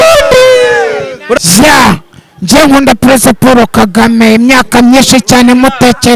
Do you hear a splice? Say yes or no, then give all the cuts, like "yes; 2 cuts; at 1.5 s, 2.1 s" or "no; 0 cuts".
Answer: yes; 1 cut; at 1.4 s